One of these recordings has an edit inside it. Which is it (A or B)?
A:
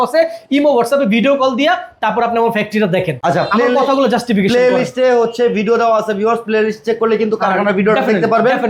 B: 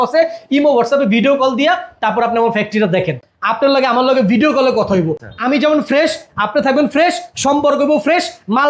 B